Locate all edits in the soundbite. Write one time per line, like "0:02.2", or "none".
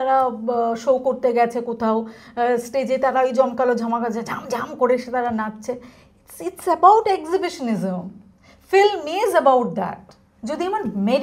0:10.2